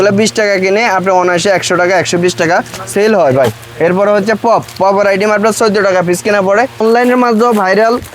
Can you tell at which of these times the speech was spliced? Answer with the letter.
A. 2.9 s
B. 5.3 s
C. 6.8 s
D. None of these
C